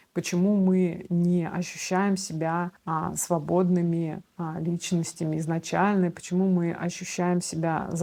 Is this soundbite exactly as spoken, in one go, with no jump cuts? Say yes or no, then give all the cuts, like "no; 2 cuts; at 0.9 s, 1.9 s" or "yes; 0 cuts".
yes; 0 cuts